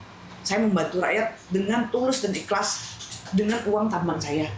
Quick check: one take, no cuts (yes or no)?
yes